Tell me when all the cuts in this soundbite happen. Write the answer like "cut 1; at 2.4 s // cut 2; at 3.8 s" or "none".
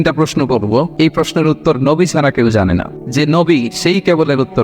cut 1; at 0.9 s // cut 2; at 3.0 s